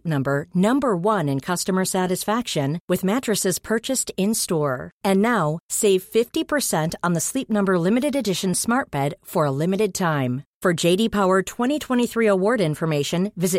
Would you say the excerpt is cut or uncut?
uncut